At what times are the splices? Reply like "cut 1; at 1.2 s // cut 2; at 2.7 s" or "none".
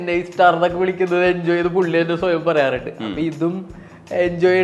none